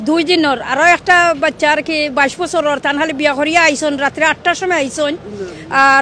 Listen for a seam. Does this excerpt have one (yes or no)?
no